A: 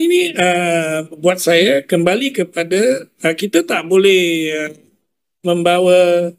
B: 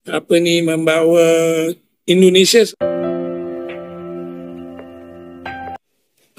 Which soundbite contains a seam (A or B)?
B